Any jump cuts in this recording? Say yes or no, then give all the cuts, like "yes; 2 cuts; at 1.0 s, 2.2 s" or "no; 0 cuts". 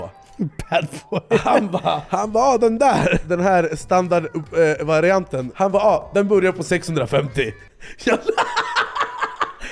yes; 3 cuts; at 2.0 s, 3.2 s, 5.4 s